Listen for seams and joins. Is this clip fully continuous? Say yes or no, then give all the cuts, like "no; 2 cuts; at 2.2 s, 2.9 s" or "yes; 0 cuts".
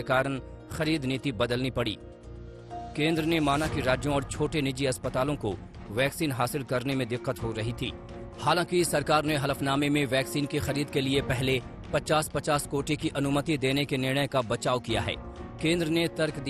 yes; 0 cuts